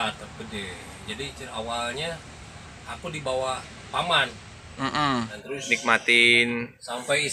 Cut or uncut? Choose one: cut